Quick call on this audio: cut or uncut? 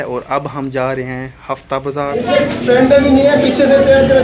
cut